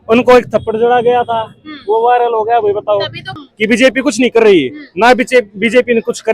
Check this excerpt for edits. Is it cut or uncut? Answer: cut